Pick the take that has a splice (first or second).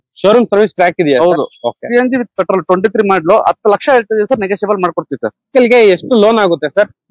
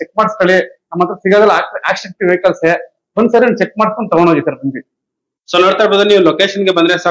first